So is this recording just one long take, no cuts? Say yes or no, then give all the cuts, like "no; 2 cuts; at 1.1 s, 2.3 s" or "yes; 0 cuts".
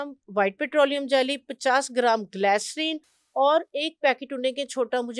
yes; 0 cuts